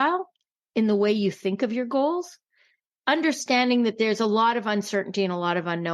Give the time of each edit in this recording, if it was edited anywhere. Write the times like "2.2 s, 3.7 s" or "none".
2.5 s